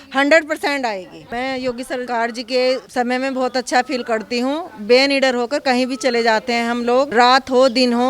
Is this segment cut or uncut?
cut